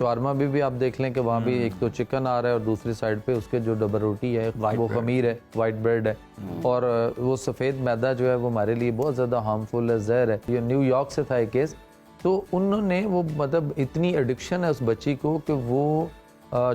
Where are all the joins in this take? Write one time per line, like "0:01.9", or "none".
0:10.4